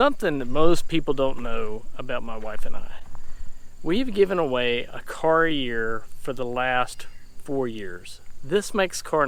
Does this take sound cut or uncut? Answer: uncut